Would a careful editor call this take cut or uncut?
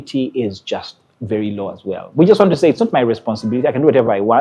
uncut